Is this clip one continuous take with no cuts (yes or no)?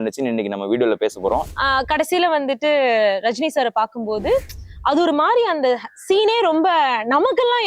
no